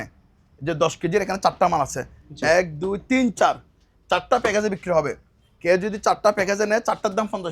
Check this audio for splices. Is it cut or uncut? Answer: uncut